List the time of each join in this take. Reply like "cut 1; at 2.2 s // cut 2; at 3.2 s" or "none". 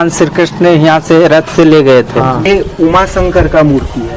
cut 1; at 2.5 s